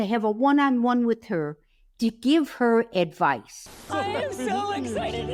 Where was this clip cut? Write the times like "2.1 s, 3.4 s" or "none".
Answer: none